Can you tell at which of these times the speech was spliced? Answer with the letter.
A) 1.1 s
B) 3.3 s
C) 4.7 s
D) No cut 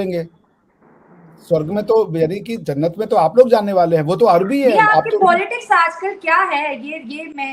D